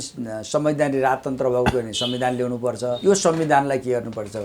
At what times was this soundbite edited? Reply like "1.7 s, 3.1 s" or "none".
3.0 s

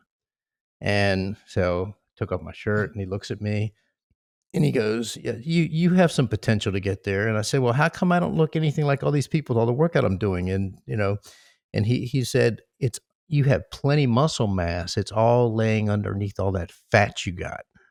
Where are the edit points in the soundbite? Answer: none

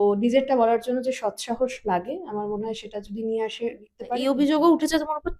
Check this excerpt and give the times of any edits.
4.2 s

